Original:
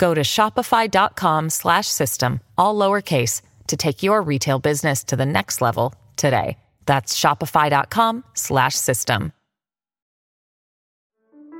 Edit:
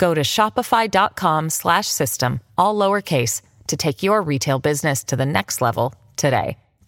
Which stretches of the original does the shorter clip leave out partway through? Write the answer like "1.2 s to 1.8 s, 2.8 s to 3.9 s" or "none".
none